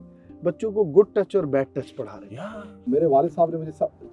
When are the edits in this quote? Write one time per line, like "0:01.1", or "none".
0:02.7